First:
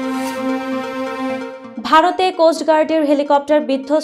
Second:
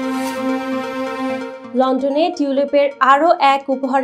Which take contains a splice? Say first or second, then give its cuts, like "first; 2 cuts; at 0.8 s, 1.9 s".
second; 1 cut; at 1.6 s